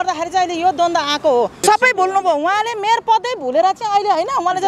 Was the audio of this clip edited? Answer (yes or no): yes